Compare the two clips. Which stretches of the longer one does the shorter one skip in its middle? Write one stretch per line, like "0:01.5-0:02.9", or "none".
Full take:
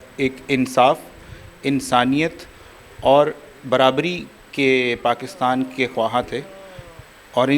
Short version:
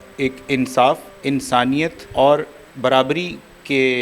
0:01.5-0:02.4

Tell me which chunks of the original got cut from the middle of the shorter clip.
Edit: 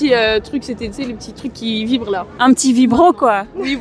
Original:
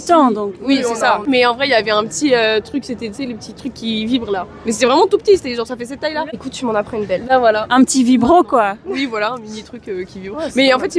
0:04.5-0:07.6

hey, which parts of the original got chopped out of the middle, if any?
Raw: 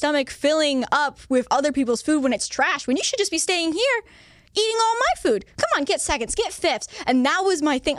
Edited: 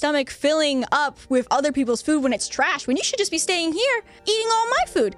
0:04.1-0:04.4

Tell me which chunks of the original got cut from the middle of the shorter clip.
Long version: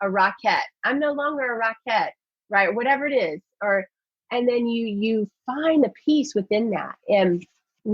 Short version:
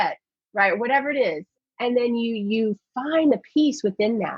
0:03.5-0:04.0

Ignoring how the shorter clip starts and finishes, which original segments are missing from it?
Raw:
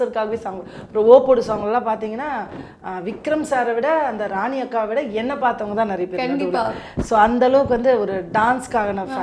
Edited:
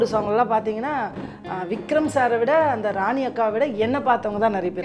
none

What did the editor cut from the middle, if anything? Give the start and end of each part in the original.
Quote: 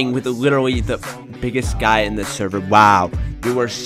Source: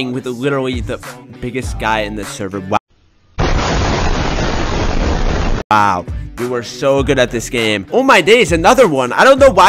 0:02.8-0:05.7

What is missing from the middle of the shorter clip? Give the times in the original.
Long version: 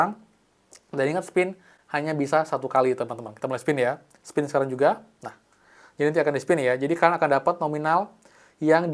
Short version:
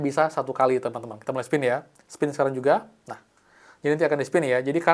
none

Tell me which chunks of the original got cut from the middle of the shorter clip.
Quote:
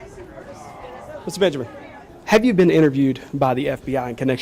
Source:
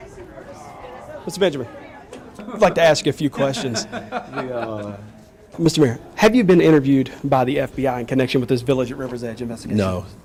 0:02.1-0:06.0

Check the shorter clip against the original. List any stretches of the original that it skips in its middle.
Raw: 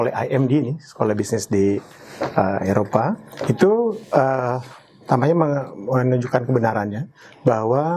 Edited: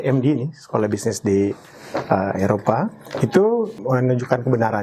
0:04.0-0:05.8

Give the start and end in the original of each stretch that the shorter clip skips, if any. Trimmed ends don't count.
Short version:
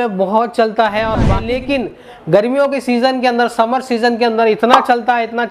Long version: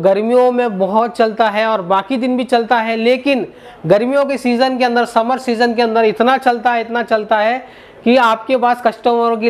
0:02.0-0:02.9

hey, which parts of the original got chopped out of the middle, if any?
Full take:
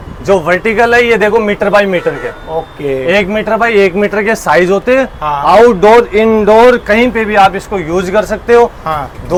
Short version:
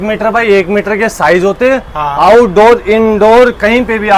none

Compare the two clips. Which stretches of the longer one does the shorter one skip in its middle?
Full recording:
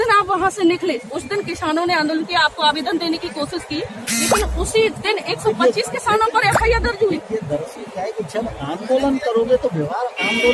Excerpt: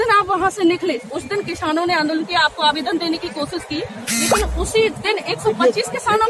none

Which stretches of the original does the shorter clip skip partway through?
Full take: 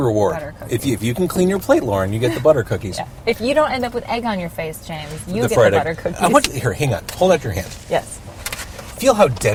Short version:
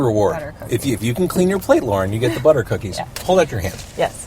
0:03.1-0:07.0

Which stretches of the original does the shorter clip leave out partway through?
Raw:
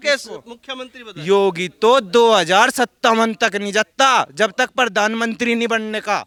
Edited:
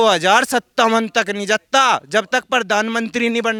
none

